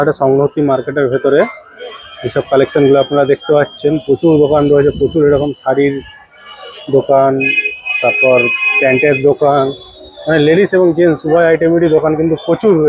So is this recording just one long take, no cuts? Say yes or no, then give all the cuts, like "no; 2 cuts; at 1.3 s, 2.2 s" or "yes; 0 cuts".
yes; 0 cuts